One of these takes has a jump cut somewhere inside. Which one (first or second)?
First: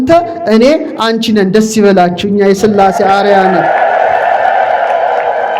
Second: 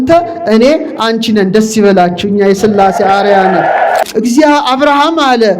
second